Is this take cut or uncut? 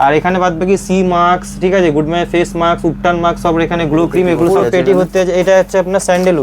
cut